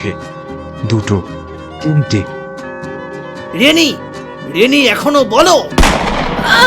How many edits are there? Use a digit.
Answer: 1